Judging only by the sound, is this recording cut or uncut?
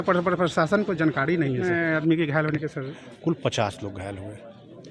cut